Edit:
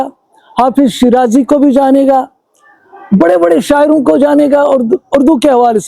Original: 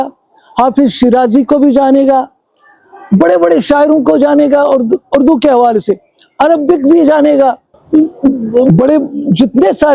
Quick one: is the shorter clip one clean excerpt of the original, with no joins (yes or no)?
yes